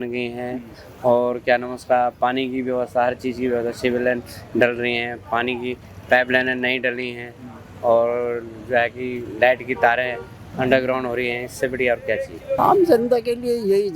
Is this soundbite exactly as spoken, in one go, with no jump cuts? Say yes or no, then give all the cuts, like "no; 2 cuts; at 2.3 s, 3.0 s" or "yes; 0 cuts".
no; 1 cut; at 12.6 s